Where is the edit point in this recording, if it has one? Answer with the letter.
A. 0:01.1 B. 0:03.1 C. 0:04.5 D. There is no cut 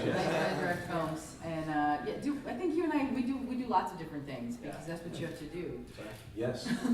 B